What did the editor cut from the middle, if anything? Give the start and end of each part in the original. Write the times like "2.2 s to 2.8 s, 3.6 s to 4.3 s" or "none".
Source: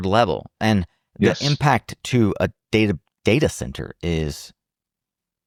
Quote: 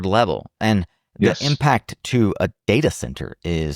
2.6 s to 3.2 s